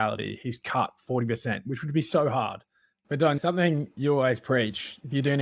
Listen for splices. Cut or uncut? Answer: cut